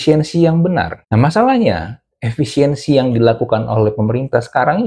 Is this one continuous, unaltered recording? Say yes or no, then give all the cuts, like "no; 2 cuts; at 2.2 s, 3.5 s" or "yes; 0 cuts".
yes; 0 cuts